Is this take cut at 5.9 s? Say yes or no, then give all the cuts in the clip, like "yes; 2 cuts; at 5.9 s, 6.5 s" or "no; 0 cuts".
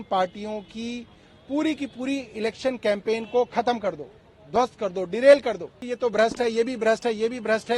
yes; 1 cut; at 5.9 s